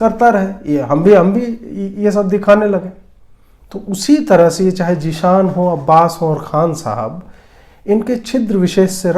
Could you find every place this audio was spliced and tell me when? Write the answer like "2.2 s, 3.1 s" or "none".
3.0 s